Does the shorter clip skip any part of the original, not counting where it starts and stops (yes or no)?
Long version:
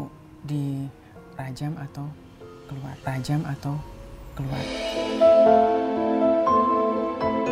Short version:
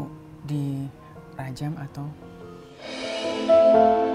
yes